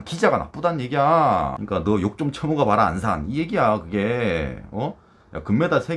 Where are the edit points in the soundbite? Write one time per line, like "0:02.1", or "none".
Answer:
0:01.6